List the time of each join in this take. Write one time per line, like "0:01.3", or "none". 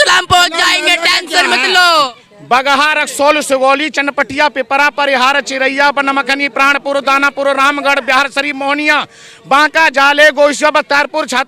0:02.1